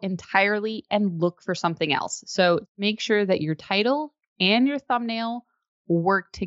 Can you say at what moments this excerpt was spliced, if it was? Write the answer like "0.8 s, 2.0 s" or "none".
2.8 s